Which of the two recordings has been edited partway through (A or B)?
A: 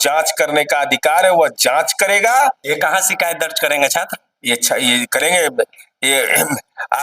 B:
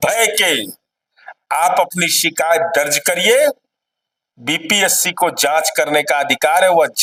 A